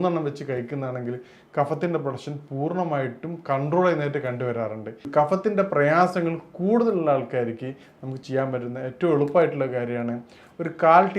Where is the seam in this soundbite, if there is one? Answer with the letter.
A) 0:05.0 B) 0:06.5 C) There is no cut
A